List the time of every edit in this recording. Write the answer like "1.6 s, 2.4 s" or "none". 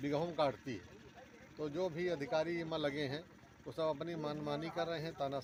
none